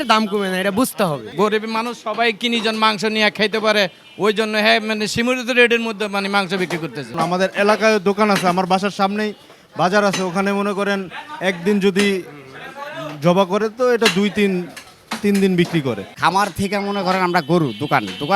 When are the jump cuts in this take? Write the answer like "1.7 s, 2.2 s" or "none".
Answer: 1.3 s, 7.1 s, 16.1 s